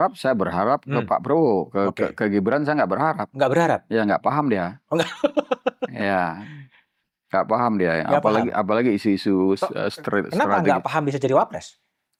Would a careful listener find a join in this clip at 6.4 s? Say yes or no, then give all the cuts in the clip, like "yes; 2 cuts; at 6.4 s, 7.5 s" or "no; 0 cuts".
no; 0 cuts